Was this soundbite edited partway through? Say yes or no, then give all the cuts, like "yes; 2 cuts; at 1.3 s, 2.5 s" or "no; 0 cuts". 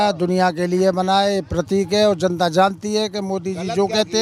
no; 0 cuts